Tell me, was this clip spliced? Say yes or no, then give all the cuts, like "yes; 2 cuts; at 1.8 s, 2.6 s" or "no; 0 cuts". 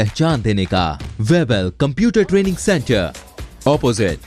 yes; 1 cut; at 1.0 s